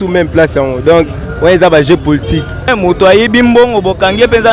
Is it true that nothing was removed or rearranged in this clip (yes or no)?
no